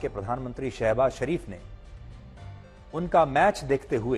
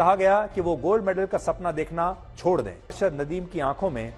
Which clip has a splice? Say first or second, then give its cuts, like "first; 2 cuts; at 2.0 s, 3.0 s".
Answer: second; 1 cut; at 2.9 s